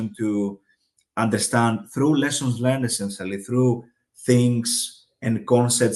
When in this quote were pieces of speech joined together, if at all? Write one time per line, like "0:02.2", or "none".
none